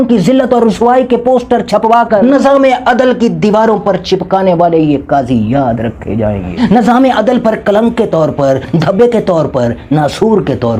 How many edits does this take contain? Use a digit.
0